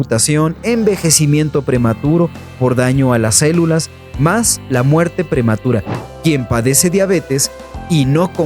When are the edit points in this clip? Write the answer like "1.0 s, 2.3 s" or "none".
5.9 s

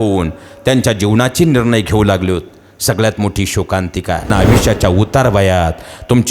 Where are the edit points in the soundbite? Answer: 4.3 s

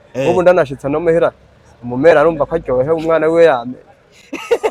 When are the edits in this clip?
none

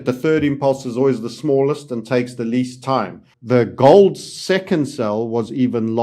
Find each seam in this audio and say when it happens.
3.3 s

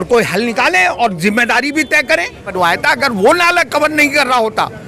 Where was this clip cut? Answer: 2.5 s

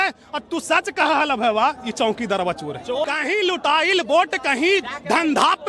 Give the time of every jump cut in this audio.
3.0 s

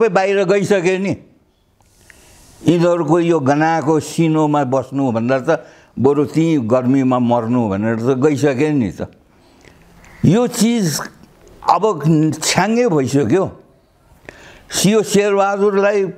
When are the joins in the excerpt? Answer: none

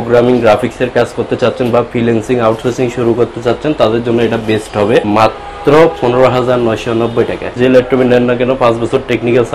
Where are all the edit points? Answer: 5.1 s, 7.6 s

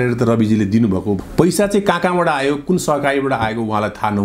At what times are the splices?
1.2 s

